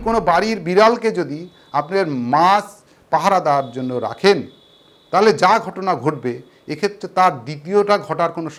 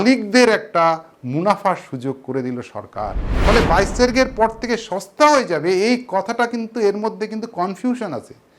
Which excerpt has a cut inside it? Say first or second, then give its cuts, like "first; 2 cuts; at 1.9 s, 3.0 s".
second; 1 cut; at 3.2 s